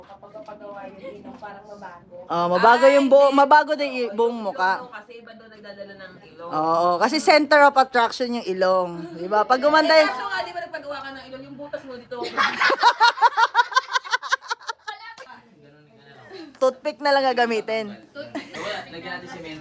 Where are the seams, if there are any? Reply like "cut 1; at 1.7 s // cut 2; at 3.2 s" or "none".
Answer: cut 1; at 15.2 s // cut 2; at 18.6 s